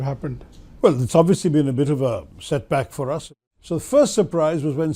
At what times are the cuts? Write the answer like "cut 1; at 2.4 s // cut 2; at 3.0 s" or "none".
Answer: cut 1; at 3.2 s